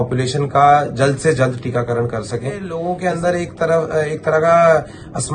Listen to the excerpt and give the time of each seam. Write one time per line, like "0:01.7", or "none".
0:02.7